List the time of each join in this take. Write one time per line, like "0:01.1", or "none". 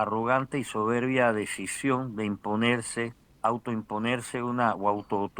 0:03.2